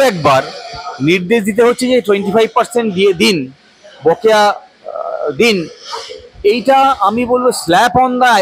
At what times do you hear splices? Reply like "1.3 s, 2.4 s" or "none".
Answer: none